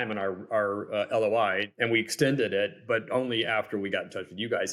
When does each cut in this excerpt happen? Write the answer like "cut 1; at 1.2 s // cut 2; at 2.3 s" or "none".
cut 1; at 1.7 s